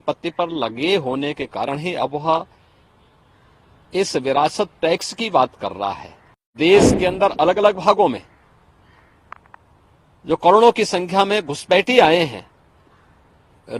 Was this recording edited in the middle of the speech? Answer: yes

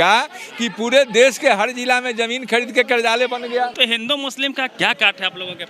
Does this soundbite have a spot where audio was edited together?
yes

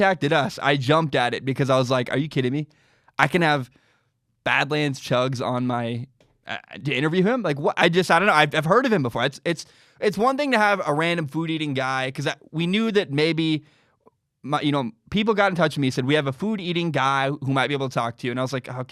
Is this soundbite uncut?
yes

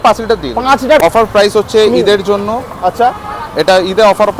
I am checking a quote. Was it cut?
yes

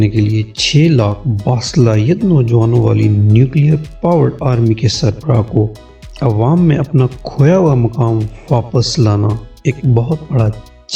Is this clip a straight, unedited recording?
yes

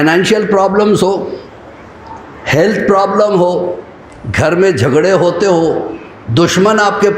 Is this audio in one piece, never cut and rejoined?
yes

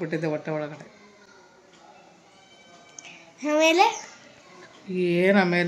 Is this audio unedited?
yes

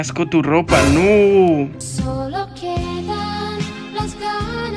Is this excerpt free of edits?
yes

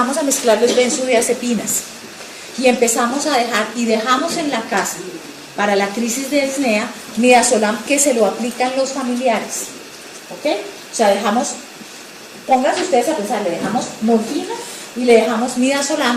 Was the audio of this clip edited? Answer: yes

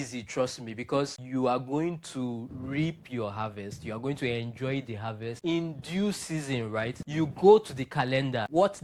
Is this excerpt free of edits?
yes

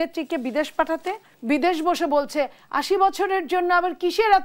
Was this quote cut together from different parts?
yes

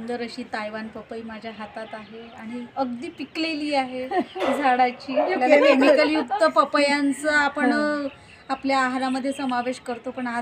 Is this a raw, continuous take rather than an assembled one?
no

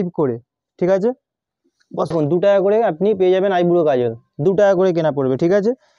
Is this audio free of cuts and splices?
yes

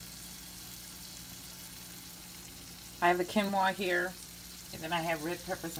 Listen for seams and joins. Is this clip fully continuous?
yes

